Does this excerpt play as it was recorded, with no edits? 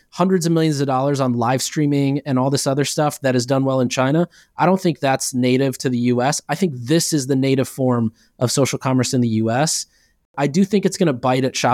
no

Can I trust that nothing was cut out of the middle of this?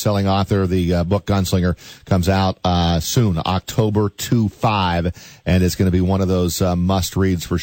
yes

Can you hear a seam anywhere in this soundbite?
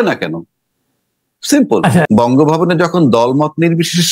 yes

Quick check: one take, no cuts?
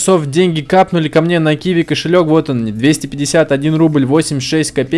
yes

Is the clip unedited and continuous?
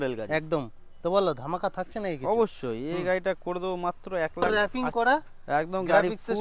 no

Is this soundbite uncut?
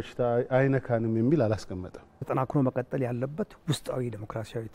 no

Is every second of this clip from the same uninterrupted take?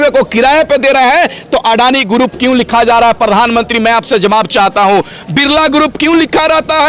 yes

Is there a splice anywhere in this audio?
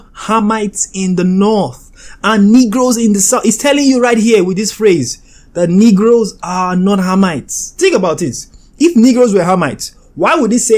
no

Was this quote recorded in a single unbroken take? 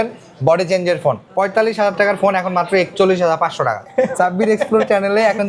no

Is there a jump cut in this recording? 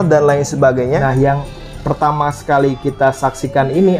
yes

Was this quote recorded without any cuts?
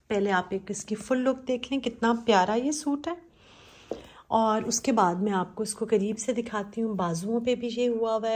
yes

